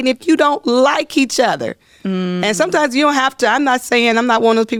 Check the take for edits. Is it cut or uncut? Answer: uncut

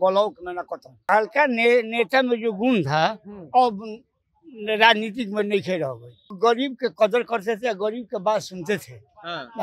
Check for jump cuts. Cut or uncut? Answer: cut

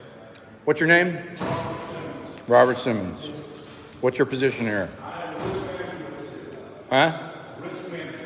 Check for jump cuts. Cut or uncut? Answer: uncut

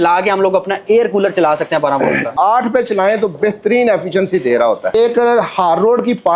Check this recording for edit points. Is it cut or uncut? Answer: cut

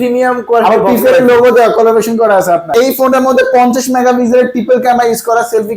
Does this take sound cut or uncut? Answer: cut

